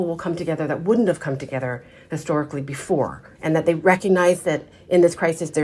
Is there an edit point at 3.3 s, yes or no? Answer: yes